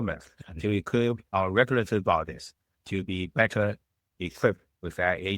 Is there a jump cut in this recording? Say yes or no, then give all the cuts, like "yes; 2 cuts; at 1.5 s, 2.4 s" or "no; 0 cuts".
yes; 1 cut; at 4.0 s